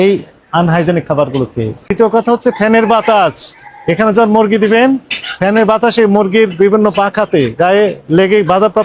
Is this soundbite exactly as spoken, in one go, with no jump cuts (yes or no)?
no